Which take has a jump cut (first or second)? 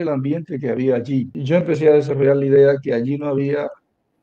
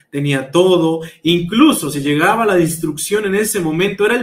first